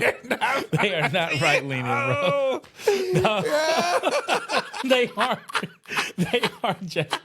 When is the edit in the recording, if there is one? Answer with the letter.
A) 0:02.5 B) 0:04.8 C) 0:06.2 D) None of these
B